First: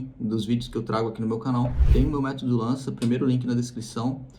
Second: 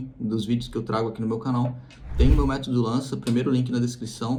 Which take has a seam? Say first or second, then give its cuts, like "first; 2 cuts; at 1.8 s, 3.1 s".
first; 1 cut; at 1.8 s